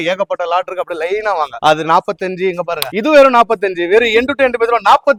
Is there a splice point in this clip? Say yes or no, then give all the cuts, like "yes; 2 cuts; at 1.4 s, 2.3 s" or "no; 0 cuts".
no; 0 cuts